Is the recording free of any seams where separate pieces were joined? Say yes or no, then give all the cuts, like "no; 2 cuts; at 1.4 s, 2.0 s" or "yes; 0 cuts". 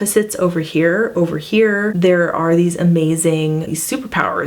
no; 2 cuts; at 1.9 s, 3.7 s